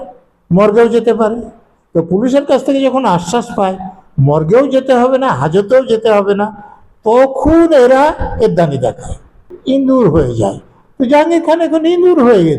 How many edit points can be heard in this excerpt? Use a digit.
1